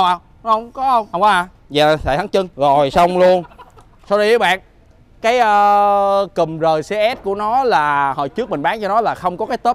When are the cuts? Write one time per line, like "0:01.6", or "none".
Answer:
0:01.1
0:02.5